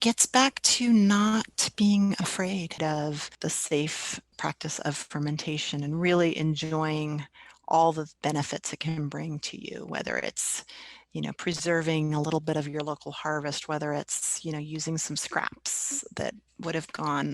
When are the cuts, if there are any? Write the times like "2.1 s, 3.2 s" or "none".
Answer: 2.8 s